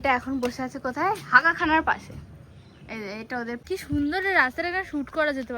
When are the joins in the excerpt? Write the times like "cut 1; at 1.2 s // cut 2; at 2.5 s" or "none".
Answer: cut 1; at 3.6 s